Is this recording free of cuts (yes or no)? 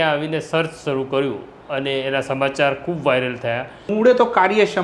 no